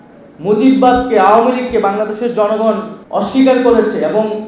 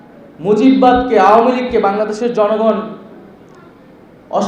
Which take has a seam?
first; 1 cut; at 2.9 s

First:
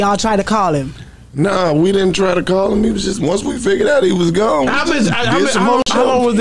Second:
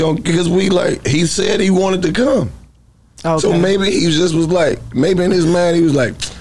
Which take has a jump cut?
first; 1 cut; at 4.9 s

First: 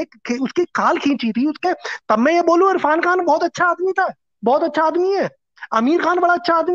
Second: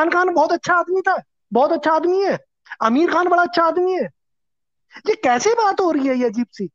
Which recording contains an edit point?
first; 1 cut; at 1.6 s

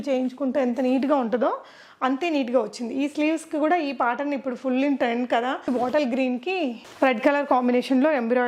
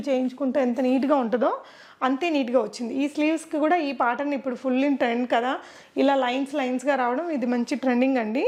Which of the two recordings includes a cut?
first; 1 cut; at 5.7 s

